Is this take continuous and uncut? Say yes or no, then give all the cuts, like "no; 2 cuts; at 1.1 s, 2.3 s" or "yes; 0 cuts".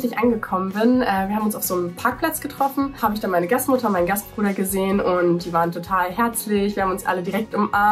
yes; 0 cuts